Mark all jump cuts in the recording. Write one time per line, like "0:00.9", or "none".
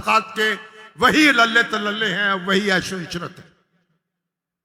none